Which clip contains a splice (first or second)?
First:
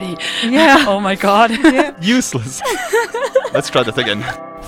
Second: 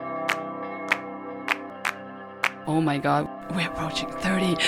second